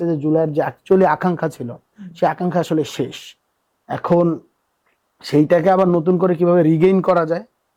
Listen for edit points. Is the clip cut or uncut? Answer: uncut